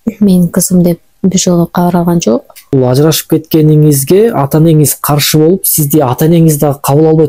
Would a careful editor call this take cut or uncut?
cut